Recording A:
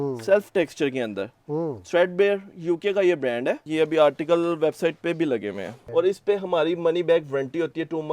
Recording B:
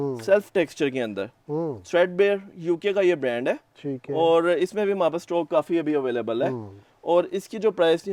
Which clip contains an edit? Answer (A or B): A